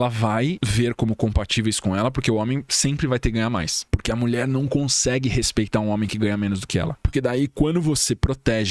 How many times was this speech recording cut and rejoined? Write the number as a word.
one